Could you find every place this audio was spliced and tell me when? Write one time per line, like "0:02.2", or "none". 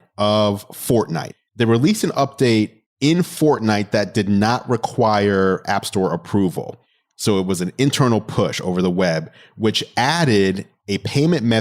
0:01.2
0:02.8